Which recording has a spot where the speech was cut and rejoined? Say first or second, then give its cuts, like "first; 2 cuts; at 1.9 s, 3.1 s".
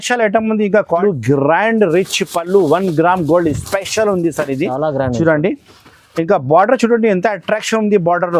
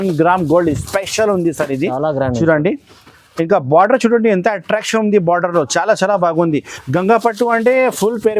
first; 1 cut; at 1.0 s